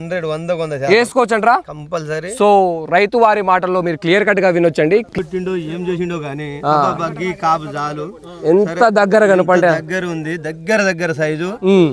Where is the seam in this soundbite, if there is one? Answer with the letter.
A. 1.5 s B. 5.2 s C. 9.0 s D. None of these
B